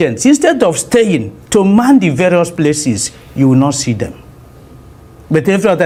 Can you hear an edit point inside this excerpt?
no; 0 cuts

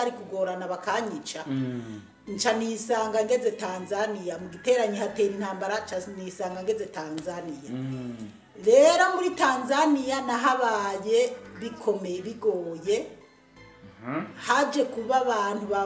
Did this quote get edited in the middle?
no; 0 cuts

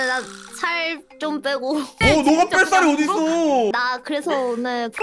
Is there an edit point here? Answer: yes; 1 cut; at 3.7 s

